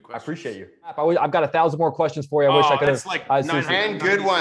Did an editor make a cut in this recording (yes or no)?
yes